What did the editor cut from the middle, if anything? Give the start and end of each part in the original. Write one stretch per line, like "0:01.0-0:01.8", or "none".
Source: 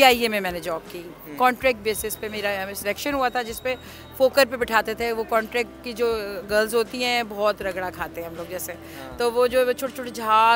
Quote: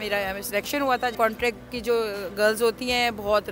0:03.5-0:05.3